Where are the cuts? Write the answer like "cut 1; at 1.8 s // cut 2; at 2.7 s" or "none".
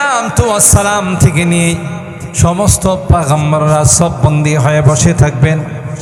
none